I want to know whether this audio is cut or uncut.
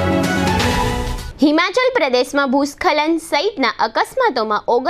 cut